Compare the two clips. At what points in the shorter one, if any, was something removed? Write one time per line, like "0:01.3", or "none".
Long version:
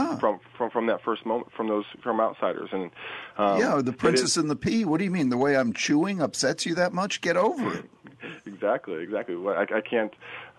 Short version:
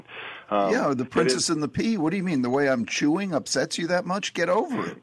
none